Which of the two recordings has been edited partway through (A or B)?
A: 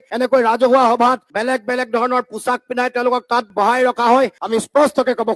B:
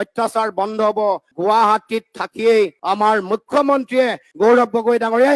A